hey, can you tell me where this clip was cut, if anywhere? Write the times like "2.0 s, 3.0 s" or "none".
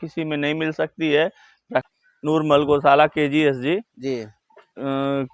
2.0 s